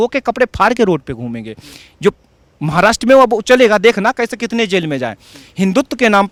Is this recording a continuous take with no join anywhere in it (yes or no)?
yes